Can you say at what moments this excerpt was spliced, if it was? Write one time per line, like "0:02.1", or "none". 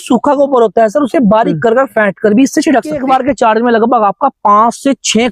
0:03.0